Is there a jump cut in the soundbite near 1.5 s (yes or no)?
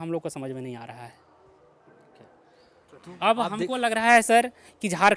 no